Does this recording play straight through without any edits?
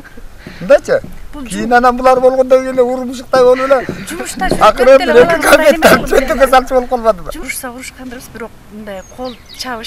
no; 1 cut; at 7.5 s

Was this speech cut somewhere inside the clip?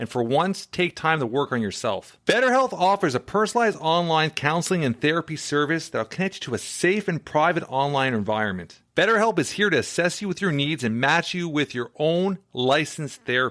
no; 0 cuts

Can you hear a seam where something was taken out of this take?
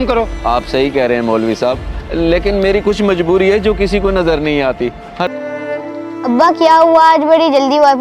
yes; 1 cut; at 5.3 s

